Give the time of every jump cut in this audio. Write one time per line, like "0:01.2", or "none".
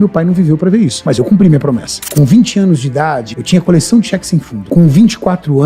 0:01.0
0:02.0
0:03.3
0:04.6